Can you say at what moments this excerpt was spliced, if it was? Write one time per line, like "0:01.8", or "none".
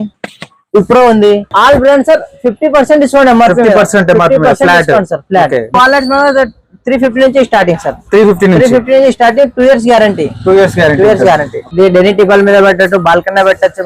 0:01.5
0:05.7
0:11.6